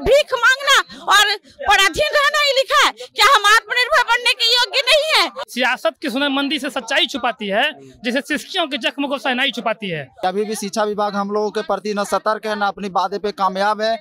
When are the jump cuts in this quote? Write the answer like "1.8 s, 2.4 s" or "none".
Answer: 5.4 s, 10.1 s